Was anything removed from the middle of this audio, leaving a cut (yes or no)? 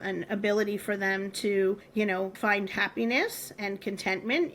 yes